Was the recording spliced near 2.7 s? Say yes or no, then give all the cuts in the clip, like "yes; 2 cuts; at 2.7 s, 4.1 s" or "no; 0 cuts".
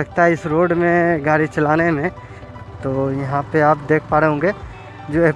yes; 1 cut; at 2.7 s